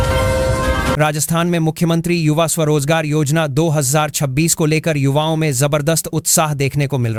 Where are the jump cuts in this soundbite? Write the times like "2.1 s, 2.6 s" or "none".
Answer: none